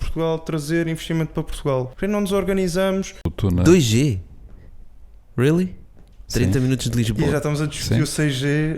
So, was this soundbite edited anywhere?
yes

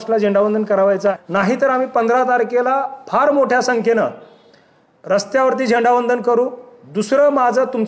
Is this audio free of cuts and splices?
no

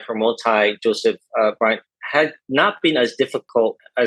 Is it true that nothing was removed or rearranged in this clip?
yes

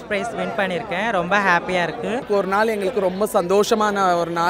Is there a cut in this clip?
yes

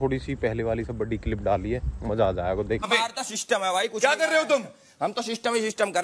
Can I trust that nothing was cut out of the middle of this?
no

